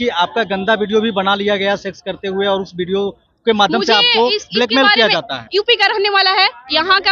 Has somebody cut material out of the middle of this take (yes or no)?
yes